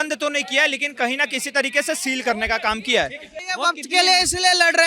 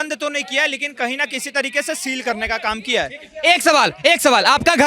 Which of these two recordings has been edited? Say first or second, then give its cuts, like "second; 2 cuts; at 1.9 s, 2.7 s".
first; 1 cut; at 3.2 s